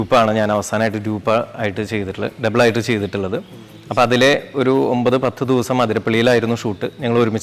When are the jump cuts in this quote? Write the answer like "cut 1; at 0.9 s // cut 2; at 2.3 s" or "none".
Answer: none